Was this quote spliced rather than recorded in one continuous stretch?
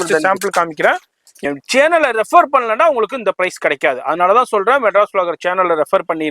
yes; 1 cut; at 1.4 s

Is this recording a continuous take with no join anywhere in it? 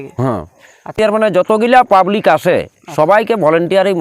no; 1 cut; at 1.0 s

